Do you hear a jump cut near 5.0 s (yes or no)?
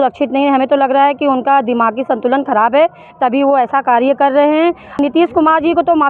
yes